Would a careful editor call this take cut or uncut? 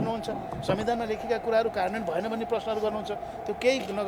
uncut